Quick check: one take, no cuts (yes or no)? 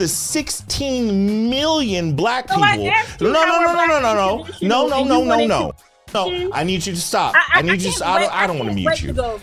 yes